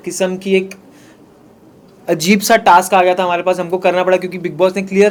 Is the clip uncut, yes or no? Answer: yes